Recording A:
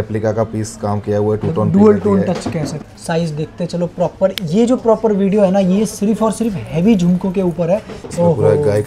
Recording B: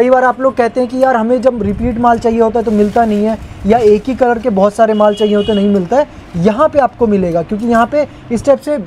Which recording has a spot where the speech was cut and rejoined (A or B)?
A